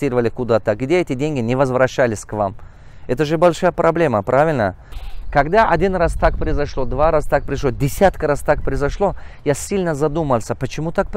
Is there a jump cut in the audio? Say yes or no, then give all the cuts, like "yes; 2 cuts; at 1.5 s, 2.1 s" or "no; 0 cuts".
yes; 1 cut; at 4.9 s